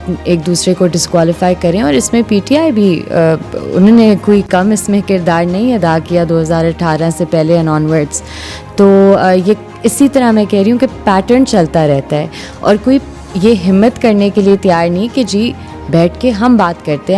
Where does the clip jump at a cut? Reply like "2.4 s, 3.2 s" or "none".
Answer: none